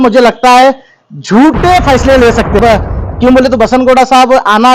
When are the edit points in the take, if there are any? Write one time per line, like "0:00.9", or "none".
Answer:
0:02.6

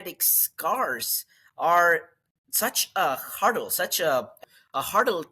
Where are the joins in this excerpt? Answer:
0:04.4

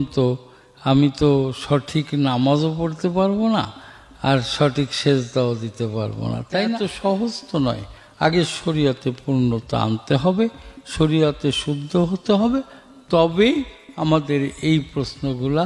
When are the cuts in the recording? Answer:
0:06.9

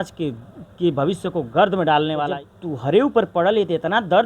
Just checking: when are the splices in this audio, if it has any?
0:02.3

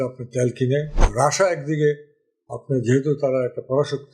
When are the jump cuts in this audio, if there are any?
0:01.0

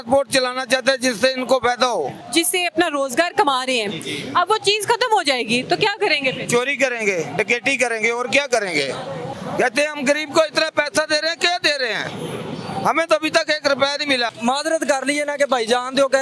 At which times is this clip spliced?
0:02.2
0:09.3
0:14.3

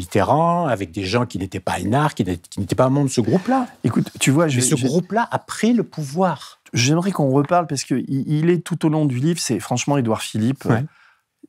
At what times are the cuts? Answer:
0:06.6

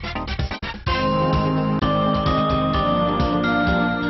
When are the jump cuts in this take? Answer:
0:01.4

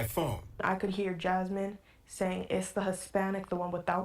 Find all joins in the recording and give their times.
0:01.1
0:01.8

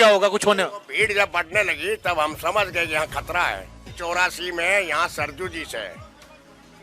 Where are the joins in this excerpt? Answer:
0:03.9

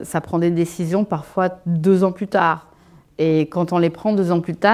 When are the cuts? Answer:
none

